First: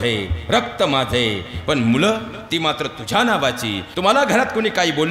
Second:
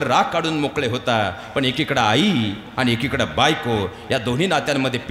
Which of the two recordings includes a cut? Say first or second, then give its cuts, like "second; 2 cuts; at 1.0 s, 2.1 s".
first; 1 cut; at 3.8 s